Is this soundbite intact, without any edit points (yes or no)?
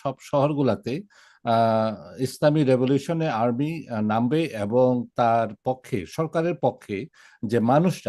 yes